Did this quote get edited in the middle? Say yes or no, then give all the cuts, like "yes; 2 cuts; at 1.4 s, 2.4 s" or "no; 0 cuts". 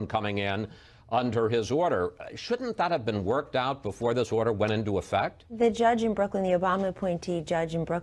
no; 0 cuts